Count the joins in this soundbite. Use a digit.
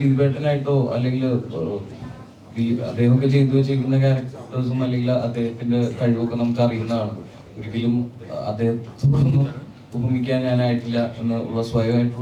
0